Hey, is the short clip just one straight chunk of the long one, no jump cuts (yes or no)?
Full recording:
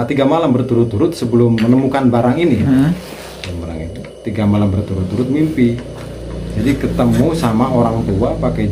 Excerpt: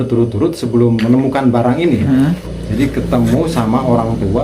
no